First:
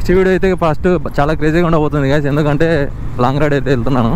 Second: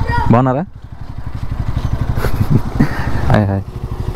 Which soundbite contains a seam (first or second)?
second